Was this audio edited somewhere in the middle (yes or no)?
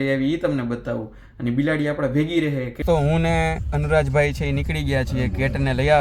yes